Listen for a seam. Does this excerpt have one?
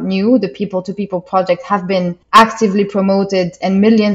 no; 0 cuts

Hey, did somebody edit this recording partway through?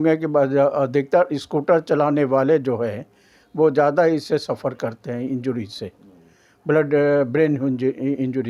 no; 0 cuts

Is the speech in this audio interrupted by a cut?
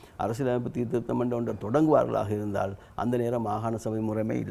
no; 0 cuts

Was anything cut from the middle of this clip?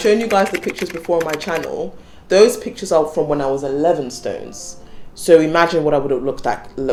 no; 0 cuts

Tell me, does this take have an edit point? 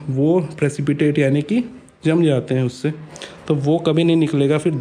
no; 0 cuts

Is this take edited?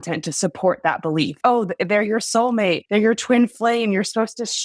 yes; 2 cuts; at 1.4 s, 2.8 s

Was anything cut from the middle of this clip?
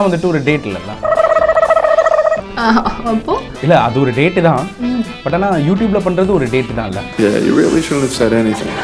no; 0 cuts

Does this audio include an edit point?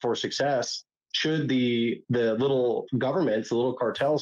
yes; 2 cuts; at 2.0 s, 2.8 s

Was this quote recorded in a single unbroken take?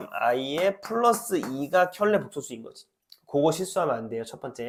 yes; 0 cuts

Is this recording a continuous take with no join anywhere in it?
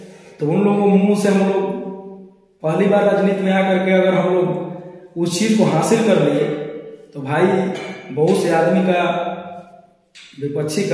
yes; 0 cuts

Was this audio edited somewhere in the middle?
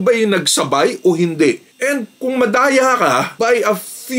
no; 0 cuts

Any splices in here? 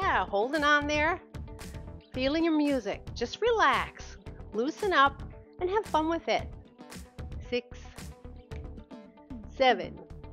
no; 0 cuts

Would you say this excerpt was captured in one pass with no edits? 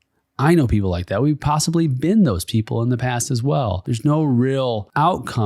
no; 1 cut; at 3.8 s

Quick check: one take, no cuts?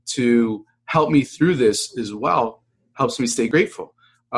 no; 1 cut; at 3.5 s

